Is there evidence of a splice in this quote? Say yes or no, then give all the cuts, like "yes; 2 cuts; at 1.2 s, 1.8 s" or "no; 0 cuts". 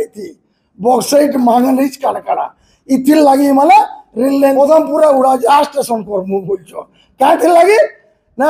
yes; 1 cut; at 4.5 s